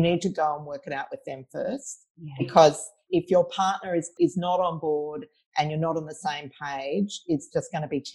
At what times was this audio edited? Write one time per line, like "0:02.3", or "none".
0:03.0
0:04.1